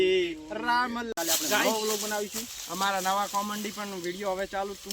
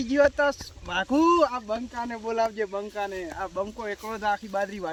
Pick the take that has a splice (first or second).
first